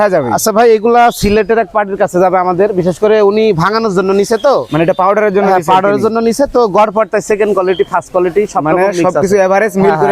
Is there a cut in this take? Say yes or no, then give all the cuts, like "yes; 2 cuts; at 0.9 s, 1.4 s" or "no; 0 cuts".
no; 0 cuts